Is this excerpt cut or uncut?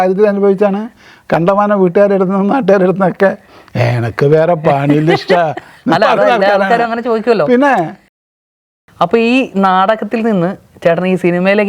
cut